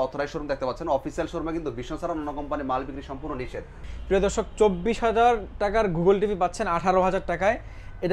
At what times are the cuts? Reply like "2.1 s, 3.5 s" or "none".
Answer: 3.9 s